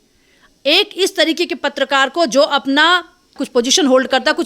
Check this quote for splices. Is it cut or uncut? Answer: cut